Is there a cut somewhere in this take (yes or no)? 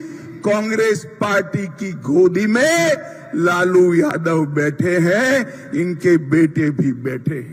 no